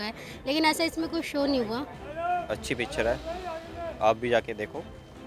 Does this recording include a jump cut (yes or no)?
yes